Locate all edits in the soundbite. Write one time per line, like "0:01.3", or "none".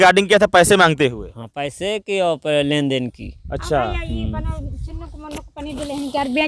none